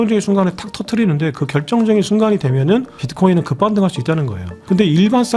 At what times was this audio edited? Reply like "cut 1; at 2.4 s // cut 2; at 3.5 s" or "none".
none